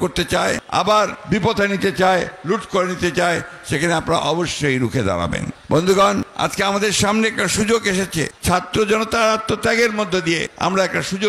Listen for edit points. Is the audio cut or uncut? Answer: cut